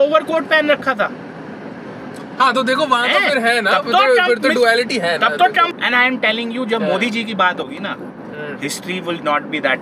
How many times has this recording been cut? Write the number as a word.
two